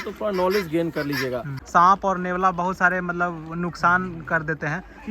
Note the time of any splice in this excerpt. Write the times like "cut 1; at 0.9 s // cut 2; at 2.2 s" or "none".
cut 1; at 1.5 s

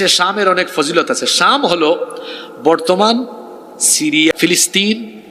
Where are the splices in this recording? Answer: cut 1; at 4.3 s

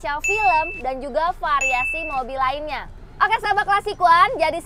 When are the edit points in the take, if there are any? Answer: cut 1; at 3.0 s

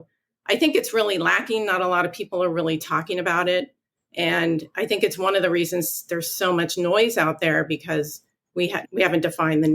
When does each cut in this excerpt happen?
cut 1; at 8.8 s

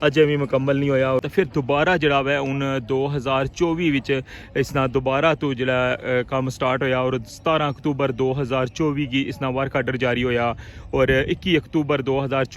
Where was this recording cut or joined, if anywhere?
cut 1; at 1.2 s

